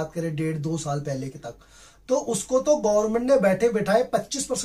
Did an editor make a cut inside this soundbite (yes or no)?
no